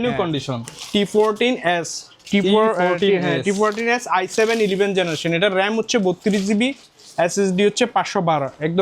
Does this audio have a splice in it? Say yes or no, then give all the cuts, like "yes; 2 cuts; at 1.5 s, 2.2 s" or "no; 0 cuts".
no; 0 cuts